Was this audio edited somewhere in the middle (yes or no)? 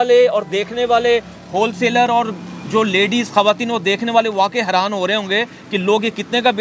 no